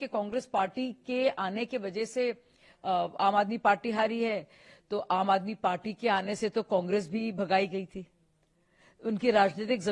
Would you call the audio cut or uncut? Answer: uncut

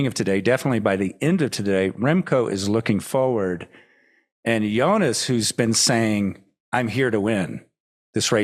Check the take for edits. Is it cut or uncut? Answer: uncut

